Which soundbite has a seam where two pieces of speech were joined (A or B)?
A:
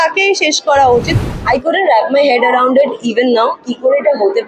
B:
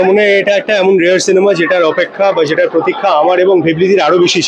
A